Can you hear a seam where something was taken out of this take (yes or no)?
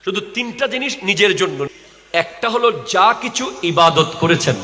yes